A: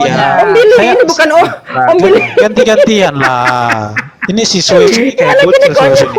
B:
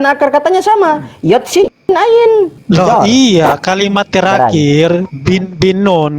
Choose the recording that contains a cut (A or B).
B